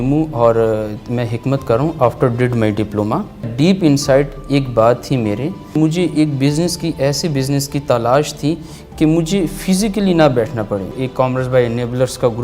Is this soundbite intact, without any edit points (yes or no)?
no